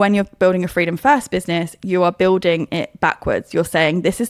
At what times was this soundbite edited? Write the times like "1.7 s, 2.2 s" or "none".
none